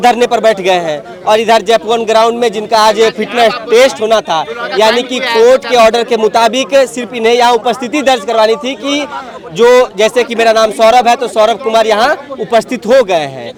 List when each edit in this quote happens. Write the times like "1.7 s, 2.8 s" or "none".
none